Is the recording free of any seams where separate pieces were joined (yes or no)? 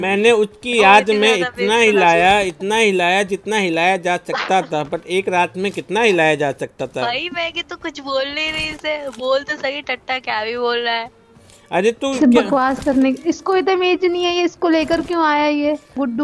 yes